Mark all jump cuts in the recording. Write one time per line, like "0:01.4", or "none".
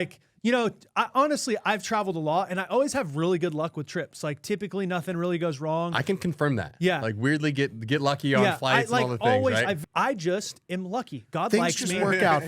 0:09.8